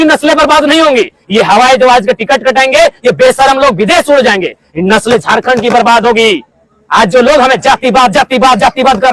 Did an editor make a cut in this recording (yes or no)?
no